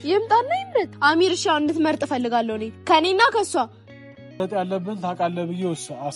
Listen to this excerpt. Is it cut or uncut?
cut